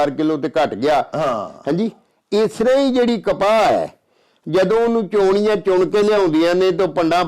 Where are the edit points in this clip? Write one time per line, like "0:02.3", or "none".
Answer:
none